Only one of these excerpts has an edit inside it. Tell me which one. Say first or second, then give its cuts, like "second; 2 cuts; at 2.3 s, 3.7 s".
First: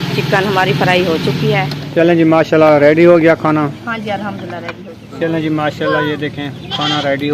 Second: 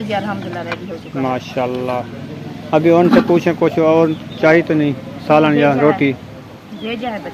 first; 2 cuts; at 1.8 s, 5.0 s